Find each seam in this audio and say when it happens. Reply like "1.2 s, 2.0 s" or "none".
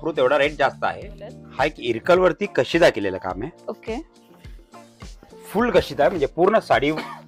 1.4 s